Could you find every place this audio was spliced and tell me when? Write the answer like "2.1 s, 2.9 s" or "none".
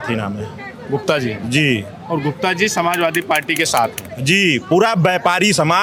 none